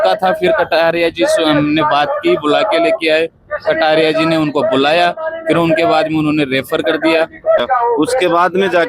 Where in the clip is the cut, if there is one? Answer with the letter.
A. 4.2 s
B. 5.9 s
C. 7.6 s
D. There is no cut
C